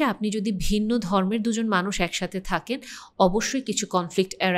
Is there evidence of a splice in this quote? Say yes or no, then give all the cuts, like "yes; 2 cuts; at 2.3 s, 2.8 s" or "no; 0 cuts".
no; 0 cuts